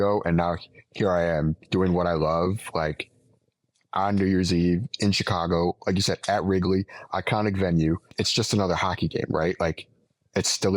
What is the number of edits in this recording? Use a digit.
1